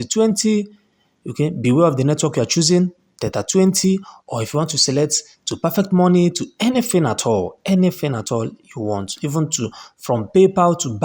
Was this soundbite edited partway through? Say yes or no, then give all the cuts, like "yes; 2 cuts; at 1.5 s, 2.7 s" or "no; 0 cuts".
no; 0 cuts